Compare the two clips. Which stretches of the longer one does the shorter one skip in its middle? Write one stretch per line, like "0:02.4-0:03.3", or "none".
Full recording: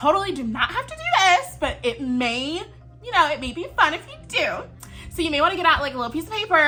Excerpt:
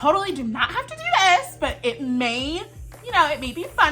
none